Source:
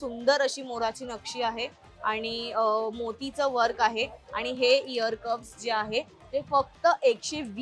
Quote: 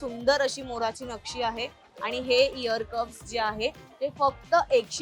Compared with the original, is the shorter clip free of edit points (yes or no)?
no